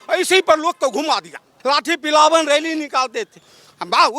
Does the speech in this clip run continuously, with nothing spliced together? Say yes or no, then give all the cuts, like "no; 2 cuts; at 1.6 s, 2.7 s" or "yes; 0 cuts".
no; 1 cut; at 1.5 s